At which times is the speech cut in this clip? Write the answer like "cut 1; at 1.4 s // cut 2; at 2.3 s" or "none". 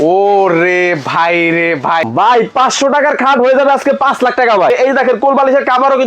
cut 1; at 2.1 s // cut 2; at 4.7 s